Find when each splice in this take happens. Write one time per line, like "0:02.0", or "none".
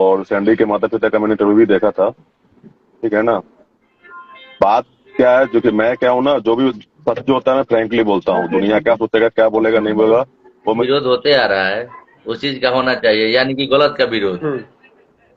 0:10.8